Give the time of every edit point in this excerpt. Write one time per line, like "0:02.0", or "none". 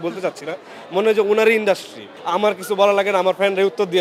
0:02.1